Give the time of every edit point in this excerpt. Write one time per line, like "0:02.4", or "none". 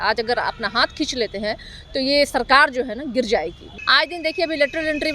0:03.7